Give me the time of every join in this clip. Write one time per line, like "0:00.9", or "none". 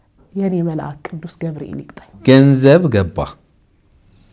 0:02.1